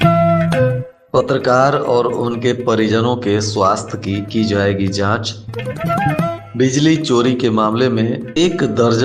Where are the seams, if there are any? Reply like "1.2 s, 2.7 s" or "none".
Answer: 0.9 s